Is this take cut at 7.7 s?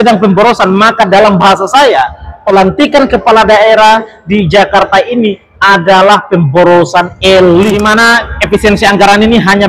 yes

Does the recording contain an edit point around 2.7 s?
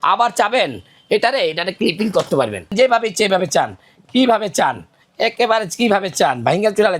yes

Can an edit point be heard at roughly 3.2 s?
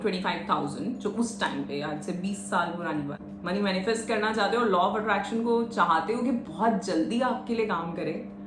yes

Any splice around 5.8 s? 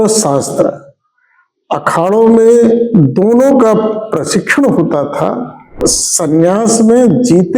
yes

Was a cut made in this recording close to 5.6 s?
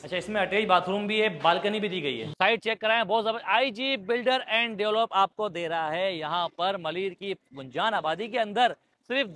no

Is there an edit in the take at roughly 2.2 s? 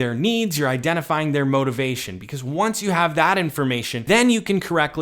no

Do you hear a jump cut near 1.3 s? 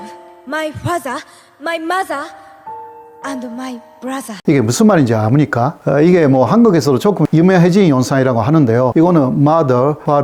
no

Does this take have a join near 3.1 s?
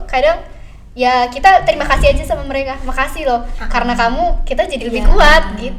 no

